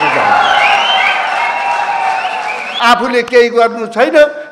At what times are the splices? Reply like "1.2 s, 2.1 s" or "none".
2.6 s